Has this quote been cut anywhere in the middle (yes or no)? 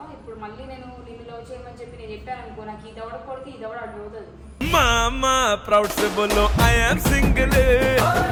no